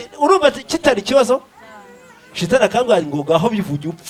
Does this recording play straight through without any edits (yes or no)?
yes